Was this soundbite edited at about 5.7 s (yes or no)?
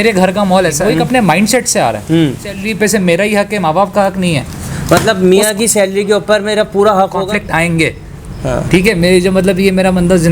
no